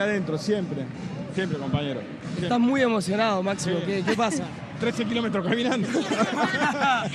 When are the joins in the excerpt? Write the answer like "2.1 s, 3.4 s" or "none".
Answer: none